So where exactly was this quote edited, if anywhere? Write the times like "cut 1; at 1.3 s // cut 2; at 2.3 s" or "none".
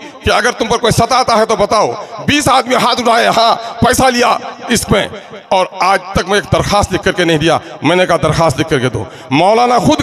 none